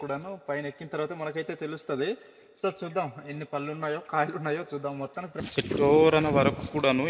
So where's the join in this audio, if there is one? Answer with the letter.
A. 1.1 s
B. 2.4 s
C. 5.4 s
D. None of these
C